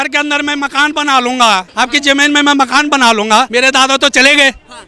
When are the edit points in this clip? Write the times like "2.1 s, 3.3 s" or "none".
1.7 s, 3.5 s